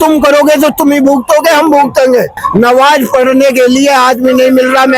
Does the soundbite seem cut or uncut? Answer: cut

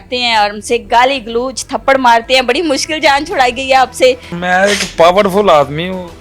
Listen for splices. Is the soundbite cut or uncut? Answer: cut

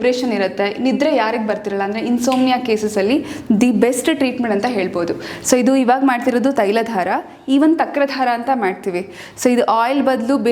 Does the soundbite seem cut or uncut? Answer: uncut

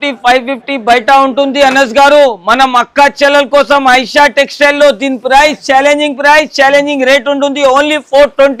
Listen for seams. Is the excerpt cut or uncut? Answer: uncut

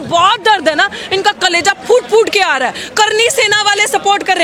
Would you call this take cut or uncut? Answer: uncut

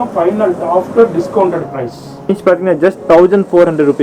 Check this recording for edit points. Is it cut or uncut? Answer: cut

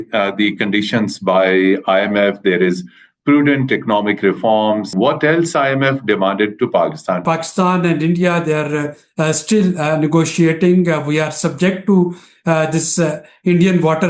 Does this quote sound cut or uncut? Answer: cut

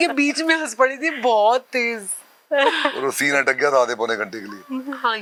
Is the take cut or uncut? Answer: uncut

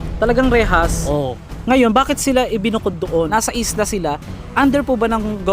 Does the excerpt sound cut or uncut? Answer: cut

